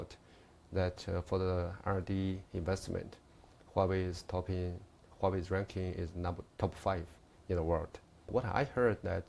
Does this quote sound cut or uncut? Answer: cut